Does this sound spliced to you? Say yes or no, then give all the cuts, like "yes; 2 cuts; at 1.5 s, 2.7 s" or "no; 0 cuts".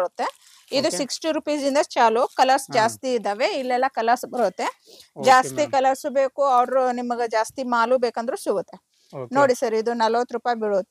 no; 0 cuts